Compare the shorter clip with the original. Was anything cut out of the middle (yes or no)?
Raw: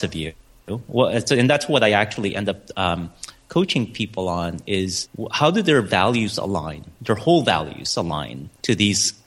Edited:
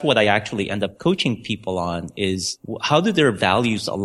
yes